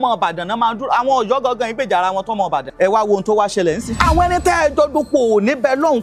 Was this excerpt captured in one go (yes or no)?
no